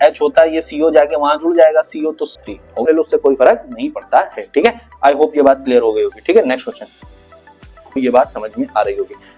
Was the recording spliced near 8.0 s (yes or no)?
yes